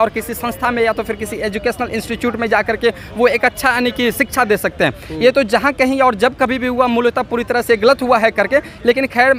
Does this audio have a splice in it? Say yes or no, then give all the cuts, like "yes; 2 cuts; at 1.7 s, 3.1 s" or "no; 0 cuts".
no; 0 cuts